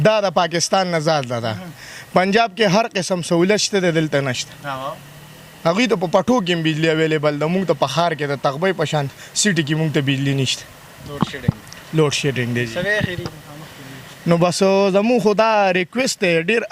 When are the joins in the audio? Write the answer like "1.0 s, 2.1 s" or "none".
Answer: none